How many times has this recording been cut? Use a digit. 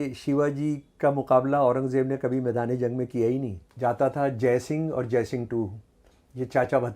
1